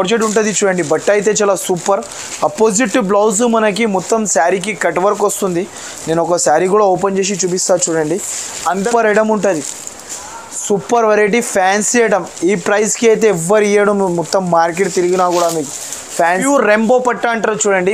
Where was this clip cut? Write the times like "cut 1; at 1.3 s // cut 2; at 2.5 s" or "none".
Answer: cut 1; at 8.9 s // cut 2; at 16.4 s